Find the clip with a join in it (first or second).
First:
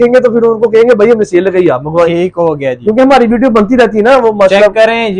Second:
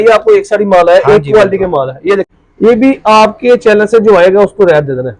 second